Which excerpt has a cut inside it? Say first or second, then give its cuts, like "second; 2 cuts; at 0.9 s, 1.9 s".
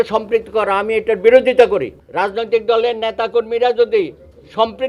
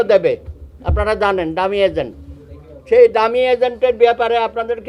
first; 1 cut; at 2.0 s